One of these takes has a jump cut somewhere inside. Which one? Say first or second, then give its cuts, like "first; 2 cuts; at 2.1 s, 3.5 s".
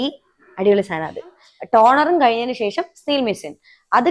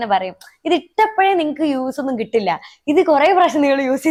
first; 1 cut; at 1.5 s